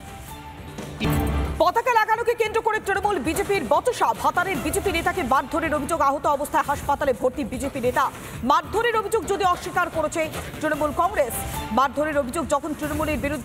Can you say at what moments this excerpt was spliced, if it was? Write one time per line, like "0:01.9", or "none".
0:01.1